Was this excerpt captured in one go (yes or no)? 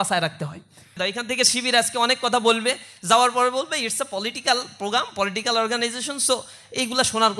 no